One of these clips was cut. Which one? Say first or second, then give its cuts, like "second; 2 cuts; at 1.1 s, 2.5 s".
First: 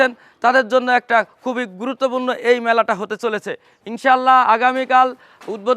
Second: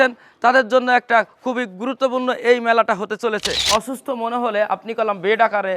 second; 1 cut; at 3.6 s